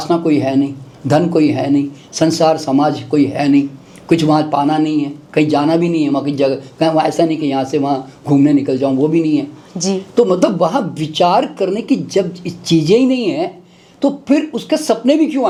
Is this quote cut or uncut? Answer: uncut